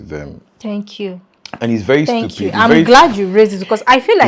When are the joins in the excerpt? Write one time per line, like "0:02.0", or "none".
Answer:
none